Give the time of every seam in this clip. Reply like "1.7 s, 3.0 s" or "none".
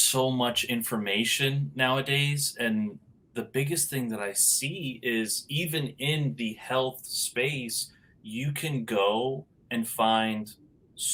none